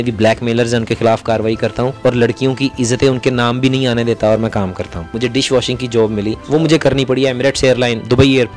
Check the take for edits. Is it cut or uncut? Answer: cut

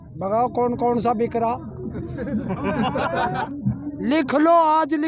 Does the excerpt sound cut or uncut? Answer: cut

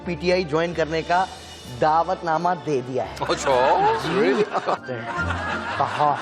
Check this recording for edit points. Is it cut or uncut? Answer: cut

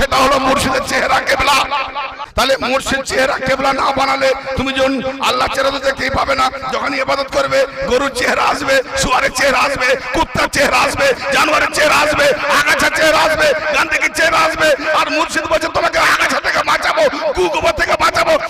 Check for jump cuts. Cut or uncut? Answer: cut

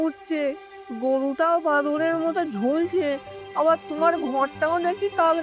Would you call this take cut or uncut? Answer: uncut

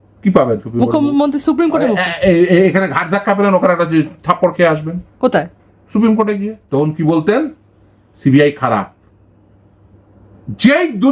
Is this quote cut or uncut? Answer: cut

